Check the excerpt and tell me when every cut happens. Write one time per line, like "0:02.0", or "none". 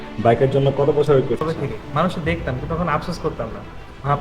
0:01.4